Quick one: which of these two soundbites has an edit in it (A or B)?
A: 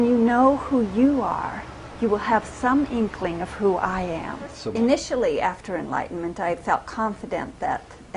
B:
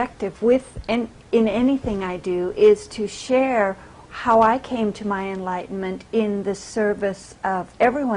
A